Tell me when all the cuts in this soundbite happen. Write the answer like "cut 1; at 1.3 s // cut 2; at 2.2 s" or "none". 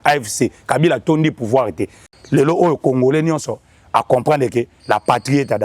cut 1; at 2.1 s